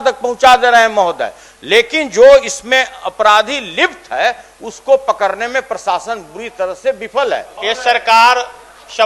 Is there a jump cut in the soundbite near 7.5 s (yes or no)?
yes